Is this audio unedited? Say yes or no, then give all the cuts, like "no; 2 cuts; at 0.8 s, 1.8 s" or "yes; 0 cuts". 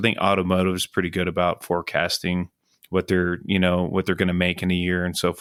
yes; 0 cuts